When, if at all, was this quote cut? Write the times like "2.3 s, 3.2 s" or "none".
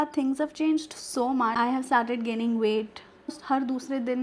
1.5 s, 3.4 s